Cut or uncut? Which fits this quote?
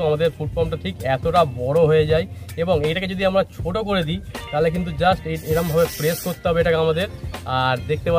uncut